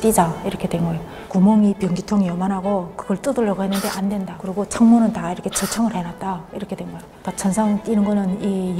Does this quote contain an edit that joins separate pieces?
no; 0 cuts

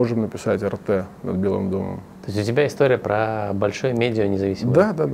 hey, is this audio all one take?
yes; 0 cuts

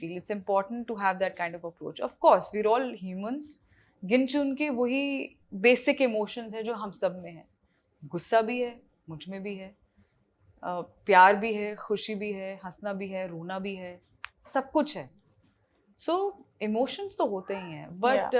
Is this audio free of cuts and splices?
yes; 0 cuts

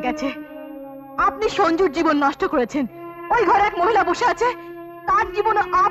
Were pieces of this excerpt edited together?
no; 0 cuts

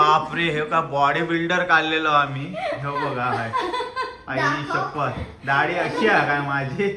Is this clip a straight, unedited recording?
yes; 0 cuts

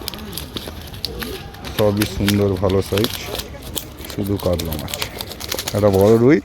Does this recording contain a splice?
yes; 1 cut; at 5.5 s

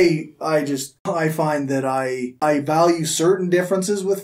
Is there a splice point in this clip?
yes; 2 cuts; at 0.9 s, 2.3 s

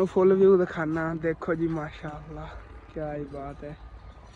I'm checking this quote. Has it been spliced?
no; 0 cuts

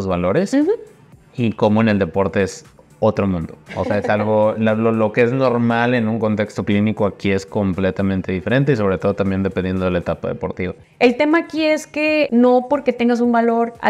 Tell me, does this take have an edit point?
yes; 2 cuts; at 10.8 s, 12.3 s

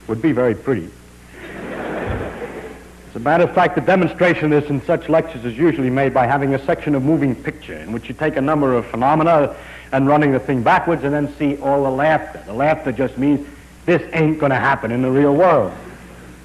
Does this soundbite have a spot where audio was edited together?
yes; 1 cut; at 2.1 s

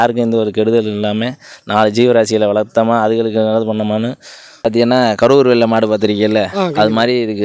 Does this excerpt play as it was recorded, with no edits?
no; 1 cut; at 4.7 s

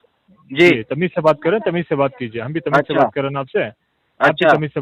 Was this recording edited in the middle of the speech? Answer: no; 0 cuts

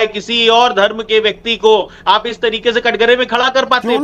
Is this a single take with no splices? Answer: yes; 0 cuts

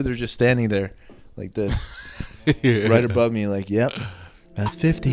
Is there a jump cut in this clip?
no; 0 cuts

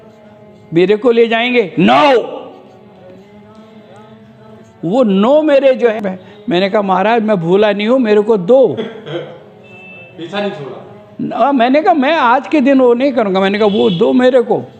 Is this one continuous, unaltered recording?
no; 1 cut; at 5.9 s

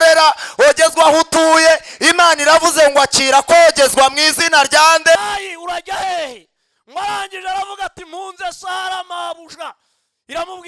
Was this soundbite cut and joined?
yes; 1 cut; at 5.2 s

